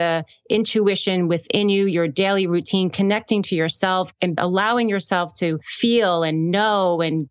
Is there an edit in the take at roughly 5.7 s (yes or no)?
yes